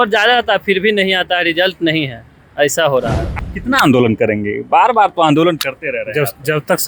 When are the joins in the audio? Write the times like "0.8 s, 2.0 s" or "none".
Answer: 3.3 s